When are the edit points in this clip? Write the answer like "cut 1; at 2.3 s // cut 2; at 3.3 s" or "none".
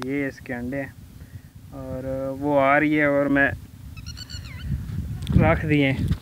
none